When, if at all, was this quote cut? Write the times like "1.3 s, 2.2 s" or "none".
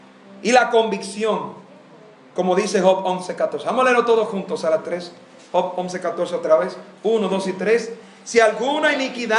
4.6 s